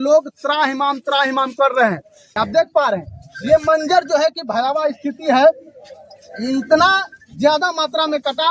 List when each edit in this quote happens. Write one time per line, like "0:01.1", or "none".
0:02.4

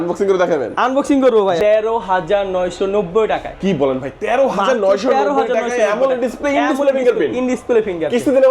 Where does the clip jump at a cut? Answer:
0:01.6

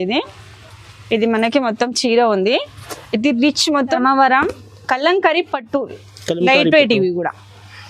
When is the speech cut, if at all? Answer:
0:04.0

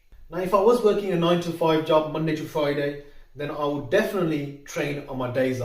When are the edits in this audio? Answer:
none

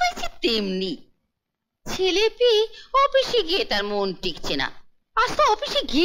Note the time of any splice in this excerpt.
none

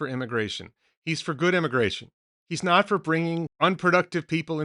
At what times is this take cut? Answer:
0:03.5

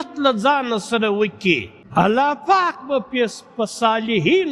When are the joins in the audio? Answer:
0:01.8

